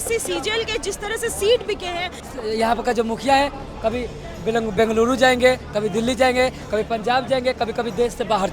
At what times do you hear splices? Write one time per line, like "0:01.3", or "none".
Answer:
0:02.2